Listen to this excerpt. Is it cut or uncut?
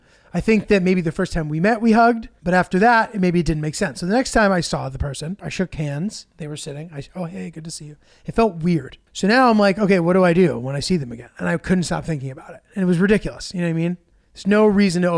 cut